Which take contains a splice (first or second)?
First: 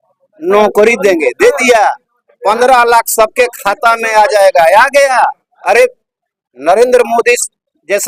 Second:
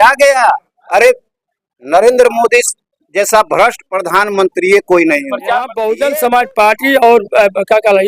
second